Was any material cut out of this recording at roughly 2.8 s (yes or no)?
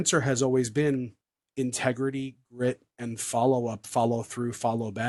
no